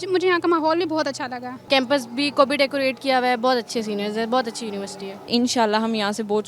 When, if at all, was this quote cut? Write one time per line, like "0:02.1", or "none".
0:01.7
0:05.3